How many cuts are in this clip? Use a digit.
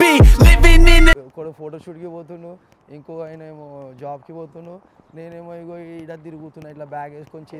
1